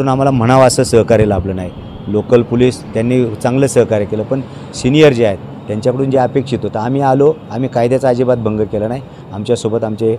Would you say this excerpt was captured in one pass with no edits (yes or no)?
yes